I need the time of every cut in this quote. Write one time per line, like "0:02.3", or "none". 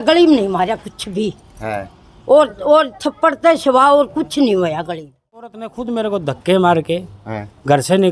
0:05.6